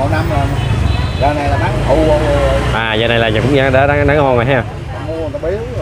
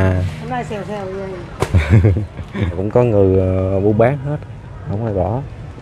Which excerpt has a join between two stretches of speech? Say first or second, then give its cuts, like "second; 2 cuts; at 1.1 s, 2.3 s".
second; 1 cut; at 2.8 s